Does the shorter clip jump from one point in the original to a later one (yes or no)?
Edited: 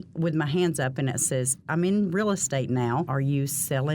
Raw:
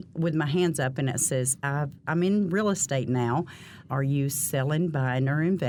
yes